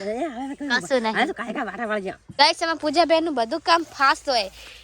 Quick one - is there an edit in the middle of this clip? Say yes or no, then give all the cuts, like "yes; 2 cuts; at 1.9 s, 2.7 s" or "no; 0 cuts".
yes; 1 cut; at 2.3 s